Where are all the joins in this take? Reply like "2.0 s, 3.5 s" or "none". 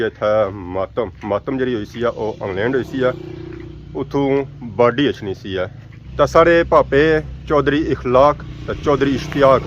none